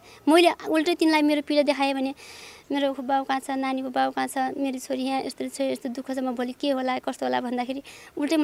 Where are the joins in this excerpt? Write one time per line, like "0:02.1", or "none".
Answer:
none